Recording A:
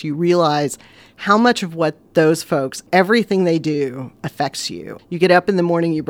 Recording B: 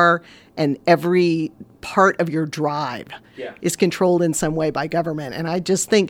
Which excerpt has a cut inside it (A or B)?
A